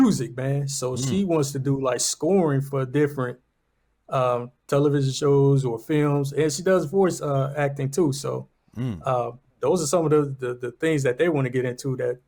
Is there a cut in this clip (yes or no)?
no